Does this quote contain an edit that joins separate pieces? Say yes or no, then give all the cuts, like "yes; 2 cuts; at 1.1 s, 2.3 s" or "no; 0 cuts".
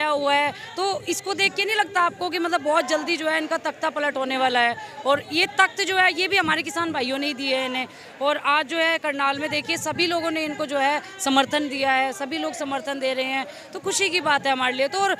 no; 0 cuts